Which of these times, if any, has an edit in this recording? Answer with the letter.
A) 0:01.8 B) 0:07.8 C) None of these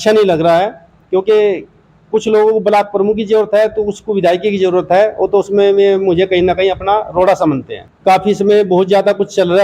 B